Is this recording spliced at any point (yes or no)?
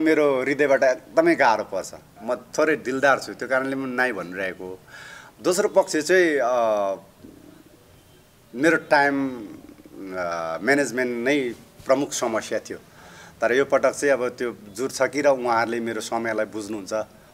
no